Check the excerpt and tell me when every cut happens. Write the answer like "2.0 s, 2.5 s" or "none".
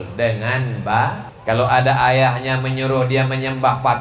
1.3 s